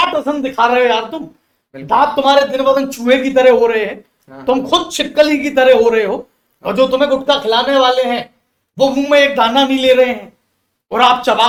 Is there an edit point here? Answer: no; 0 cuts

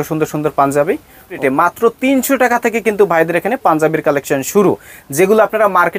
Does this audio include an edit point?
yes; 1 cut; at 1.4 s

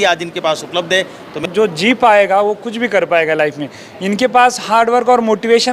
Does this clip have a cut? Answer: yes; 1 cut; at 1.4 s

